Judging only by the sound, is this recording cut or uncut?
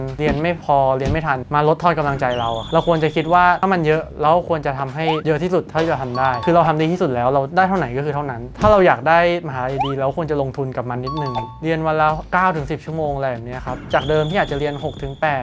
cut